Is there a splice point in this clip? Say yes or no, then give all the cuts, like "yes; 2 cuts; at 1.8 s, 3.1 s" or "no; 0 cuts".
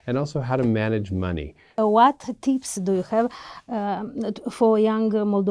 yes; 1 cut; at 1.7 s